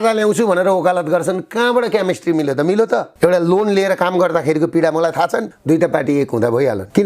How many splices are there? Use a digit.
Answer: 2